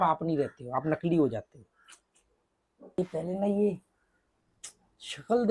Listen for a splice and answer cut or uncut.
cut